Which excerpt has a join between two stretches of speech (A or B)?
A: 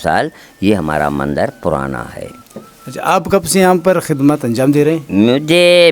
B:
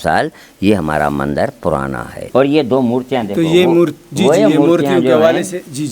B